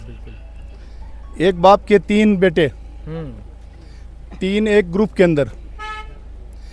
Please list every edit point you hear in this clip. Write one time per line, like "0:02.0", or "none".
none